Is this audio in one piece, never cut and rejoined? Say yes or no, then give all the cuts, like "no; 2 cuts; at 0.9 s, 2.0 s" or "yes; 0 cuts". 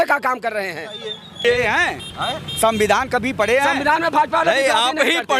no; 1 cut; at 1.4 s